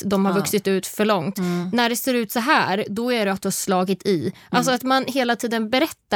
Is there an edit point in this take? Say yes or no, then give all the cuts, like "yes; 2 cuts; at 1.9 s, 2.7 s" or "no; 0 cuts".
no; 0 cuts